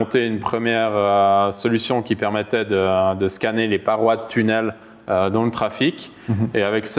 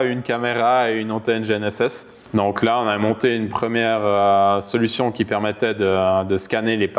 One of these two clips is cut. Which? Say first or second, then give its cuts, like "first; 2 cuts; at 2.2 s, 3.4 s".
second; 1 cut; at 2.1 s